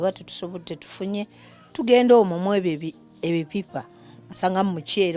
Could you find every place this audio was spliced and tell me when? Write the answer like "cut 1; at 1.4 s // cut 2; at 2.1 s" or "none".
cut 1; at 4.2 s